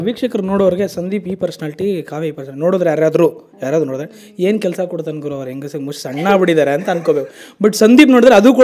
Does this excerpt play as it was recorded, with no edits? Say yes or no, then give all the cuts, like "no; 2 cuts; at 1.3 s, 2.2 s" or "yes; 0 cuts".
yes; 0 cuts